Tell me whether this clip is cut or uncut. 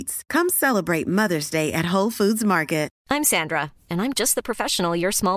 cut